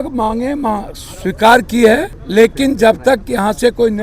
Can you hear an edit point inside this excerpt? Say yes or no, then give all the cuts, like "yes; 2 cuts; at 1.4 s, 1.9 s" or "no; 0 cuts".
yes; 1 cut; at 2.2 s